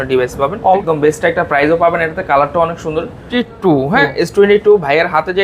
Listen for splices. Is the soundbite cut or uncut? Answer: cut